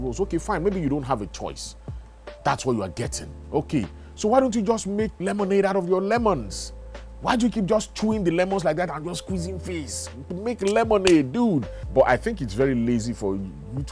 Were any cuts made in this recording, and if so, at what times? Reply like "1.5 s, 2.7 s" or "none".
11.8 s